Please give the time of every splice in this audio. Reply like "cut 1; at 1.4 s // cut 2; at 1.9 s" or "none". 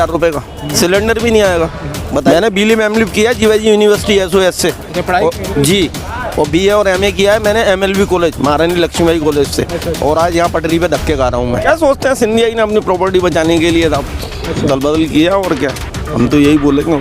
cut 1; at 0.7 s // cut 2; at 2.3 s // cut 3; at 11.6 s